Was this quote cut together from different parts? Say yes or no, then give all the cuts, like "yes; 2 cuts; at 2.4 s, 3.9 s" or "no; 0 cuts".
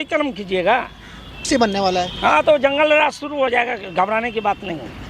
yes; 1 cut; at 1.5 s